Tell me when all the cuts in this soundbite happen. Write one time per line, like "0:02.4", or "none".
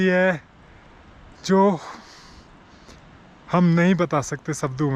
none